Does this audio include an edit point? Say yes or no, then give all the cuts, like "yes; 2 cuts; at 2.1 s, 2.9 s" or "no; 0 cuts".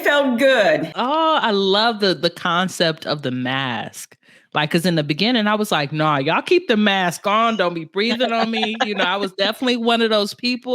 yes; 1 cut; at 0.9 s